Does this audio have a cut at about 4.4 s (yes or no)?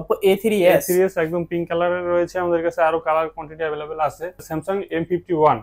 yes